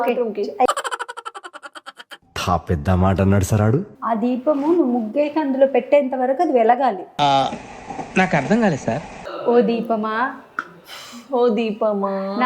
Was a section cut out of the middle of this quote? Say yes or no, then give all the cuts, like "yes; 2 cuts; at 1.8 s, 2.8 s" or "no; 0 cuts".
yes; 2 cuts; at 3.9 s, 9.1 s